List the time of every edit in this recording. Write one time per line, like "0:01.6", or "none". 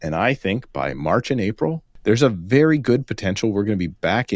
0:01.9